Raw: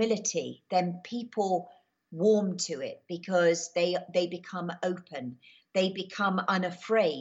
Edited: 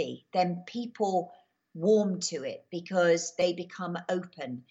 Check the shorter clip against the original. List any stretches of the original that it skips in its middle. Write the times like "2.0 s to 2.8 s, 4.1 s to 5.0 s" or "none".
3.8 s to 4.2 s